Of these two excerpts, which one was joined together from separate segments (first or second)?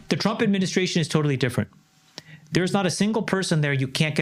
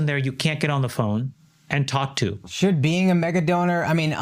second